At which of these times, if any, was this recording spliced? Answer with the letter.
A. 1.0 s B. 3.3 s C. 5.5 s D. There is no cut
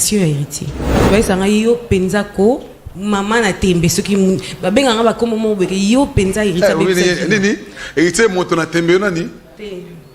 A